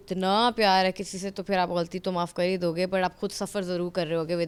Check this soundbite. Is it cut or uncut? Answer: uncut